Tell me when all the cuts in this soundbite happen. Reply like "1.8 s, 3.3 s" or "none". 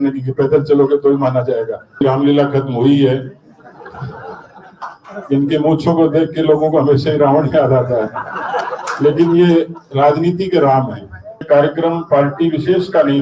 2.0 s, 11.4 s